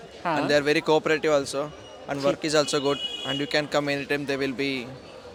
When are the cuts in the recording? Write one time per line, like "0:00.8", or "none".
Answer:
none